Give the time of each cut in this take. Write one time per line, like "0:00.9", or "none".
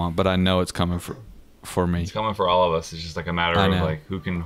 0:02.1